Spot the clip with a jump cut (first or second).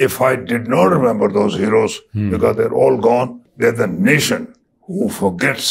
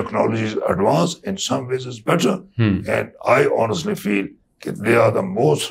first